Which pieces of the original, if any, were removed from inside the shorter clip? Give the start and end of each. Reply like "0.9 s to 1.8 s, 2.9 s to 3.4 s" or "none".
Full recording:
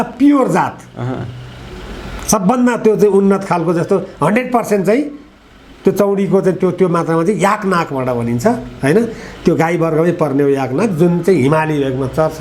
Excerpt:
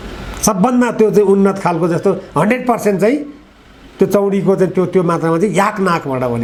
none